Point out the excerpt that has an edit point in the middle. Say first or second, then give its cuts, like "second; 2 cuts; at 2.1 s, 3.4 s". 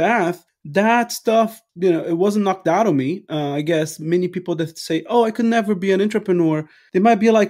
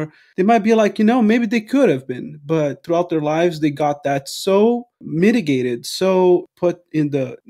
second; 1 cut; at 2.8 s